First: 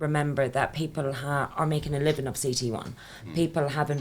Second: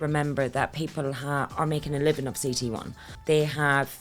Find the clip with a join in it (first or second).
second